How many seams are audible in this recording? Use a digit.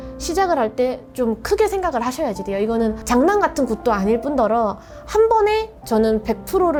0